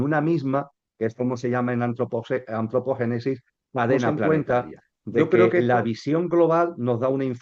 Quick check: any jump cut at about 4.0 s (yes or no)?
no